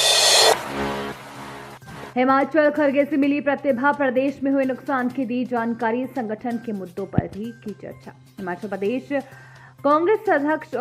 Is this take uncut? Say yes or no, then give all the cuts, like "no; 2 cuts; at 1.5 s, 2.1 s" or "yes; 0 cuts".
no; 1 cut; at 2.0 s